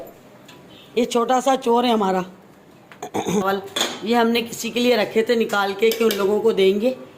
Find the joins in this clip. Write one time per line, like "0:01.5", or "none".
0:03.4